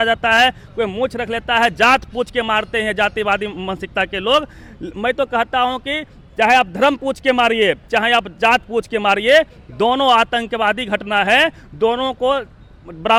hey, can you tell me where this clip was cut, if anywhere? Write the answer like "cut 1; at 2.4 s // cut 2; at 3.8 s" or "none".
none